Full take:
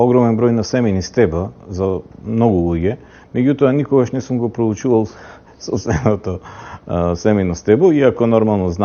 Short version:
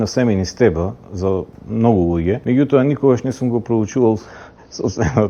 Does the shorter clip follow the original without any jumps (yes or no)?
no